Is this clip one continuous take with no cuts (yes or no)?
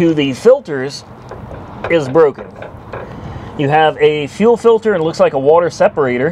yes